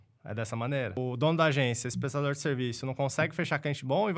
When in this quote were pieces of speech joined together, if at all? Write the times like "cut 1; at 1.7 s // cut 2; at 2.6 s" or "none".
cut 1; at 1.0 s